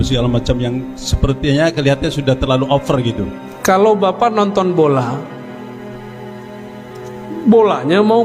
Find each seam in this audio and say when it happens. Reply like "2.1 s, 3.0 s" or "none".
3.4 s